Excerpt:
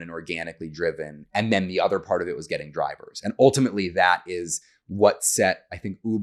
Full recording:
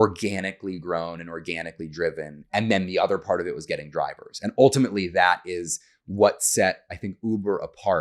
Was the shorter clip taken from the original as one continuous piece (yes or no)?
yes